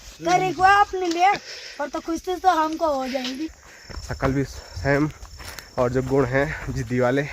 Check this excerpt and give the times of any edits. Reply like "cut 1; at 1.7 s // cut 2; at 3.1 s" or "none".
cut 1; at 3.5 s